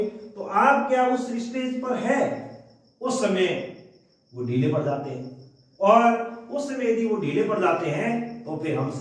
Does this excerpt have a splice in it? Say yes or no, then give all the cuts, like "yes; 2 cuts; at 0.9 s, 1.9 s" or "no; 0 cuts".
no; 0 cuts